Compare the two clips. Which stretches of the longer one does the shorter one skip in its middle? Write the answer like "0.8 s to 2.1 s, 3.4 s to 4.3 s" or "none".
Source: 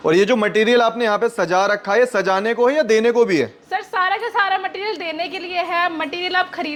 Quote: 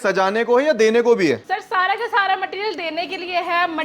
3.5 s to 3.6 s